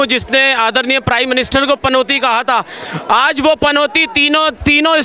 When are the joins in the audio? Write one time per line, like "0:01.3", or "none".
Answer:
none